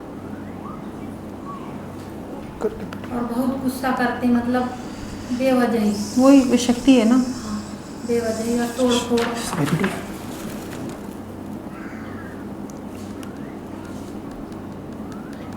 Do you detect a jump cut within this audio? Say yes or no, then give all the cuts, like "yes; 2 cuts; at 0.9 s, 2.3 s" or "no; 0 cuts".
yes; 1 cut; at 2.4 s